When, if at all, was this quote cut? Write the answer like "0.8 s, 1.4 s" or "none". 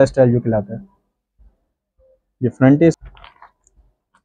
3.0 s